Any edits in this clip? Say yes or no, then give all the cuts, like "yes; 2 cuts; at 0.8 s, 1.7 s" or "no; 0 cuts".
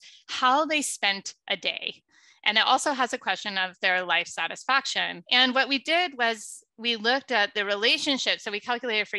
yes; 1 cut; at 5.2 s